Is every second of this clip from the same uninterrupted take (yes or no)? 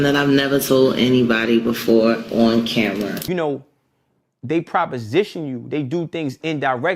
no